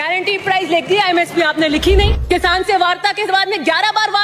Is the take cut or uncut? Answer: cut